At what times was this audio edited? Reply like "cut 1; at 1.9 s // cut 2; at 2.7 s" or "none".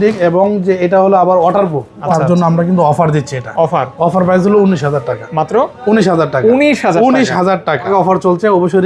cut 1; at 2.0 s // cut 2; at 7.9 s